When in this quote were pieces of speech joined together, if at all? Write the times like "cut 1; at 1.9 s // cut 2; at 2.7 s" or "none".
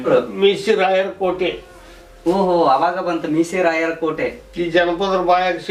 none